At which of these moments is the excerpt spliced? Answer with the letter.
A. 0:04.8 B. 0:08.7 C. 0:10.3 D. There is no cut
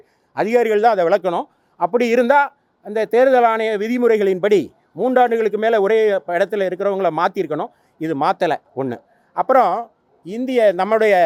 D